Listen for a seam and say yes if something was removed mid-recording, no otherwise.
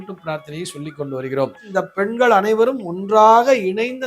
yes